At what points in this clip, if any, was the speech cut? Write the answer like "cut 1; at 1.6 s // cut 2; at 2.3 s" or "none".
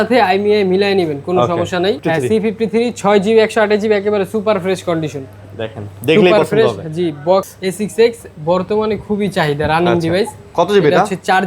cut 1; at 2.0 s // cut 2; at 7.5 s